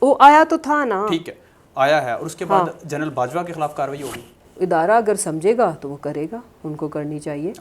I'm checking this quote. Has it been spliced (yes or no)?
yes